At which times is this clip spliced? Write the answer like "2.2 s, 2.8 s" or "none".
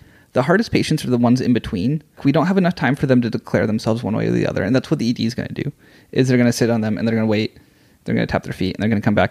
2.2 s